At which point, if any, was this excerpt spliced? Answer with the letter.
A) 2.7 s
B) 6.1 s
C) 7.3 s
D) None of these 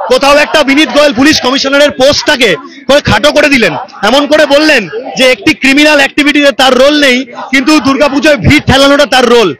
D